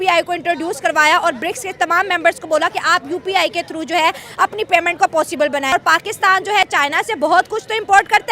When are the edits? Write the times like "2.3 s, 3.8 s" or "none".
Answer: 5.7 s